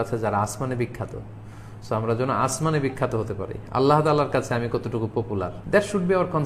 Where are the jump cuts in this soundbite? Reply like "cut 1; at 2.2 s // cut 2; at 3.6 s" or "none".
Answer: cut 1; at 5.5 s